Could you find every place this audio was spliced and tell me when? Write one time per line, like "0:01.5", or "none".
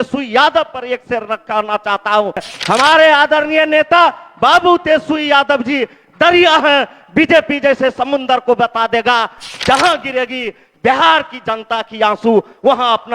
0:02.5